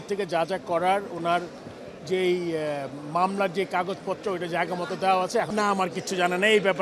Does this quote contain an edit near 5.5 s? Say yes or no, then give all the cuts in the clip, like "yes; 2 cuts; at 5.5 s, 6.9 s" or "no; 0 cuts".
yes; 1 cut; at 5.5 s